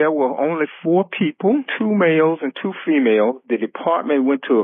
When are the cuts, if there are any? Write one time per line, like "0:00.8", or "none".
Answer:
0:01.7
0:03.4